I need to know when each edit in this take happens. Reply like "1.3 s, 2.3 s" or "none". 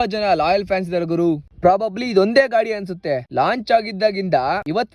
1.5 s